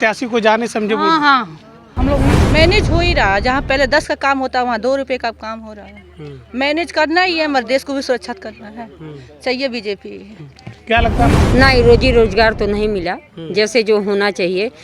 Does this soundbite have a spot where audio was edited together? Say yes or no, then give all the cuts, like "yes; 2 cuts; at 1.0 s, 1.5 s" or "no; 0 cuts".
yes; 2 cuts; at 2.2 s, 11.2 s